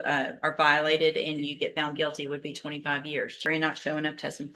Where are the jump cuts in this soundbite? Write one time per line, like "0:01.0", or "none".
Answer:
0:03.4